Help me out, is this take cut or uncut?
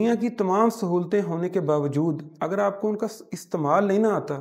uncut